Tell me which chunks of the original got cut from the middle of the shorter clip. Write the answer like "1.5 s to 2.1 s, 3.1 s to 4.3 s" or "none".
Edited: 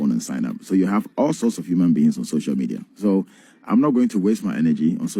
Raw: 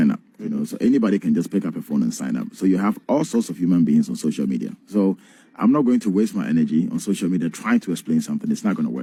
none